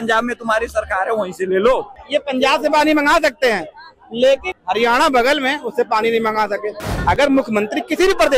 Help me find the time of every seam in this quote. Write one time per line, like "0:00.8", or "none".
0:02.0
0:04.5
0:06.9